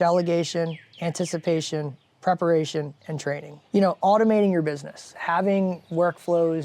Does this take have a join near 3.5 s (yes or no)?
yes